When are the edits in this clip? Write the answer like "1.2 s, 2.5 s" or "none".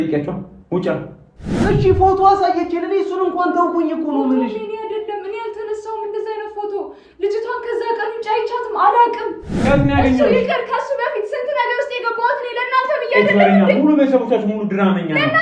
1.6 s, 9.5 s